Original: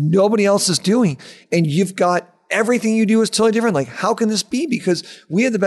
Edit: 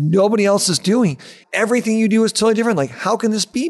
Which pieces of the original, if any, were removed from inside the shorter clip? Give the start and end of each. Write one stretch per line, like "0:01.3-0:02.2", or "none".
0:01.4-0:02.3